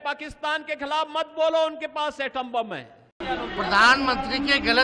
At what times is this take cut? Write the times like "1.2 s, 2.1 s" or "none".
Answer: 3.0 s